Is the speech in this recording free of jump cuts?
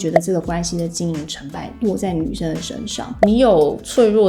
no; 1 cut; at 3.1 s

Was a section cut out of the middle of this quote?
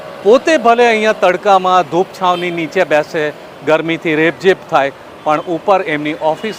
no; 0 cuts

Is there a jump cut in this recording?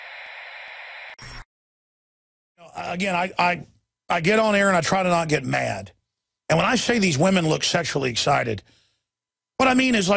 yes; 1 cut; at 1.1 s

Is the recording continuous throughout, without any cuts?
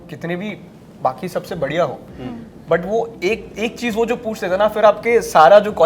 yes; 0 cuts

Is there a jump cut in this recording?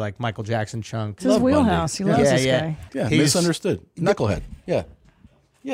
yes; 2 cuts; at 1.1 s, 2.9 s

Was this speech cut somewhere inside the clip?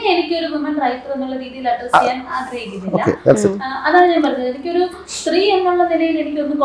no; 0 cuts

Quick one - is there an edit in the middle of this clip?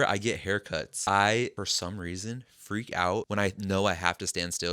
yes; 3 cuts; at 0.9 s, 1.5 s, 3.3 s

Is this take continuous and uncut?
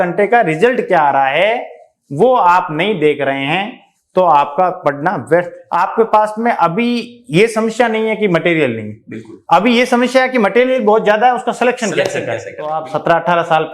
no; 2 cuts; at 5.6 s, 12.8 s

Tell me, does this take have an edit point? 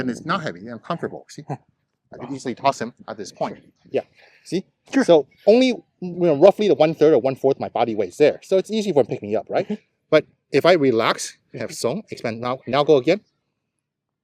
yes; 1 cut; at 3.7 s

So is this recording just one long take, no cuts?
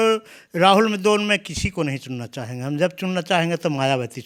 yes; 0 cuts

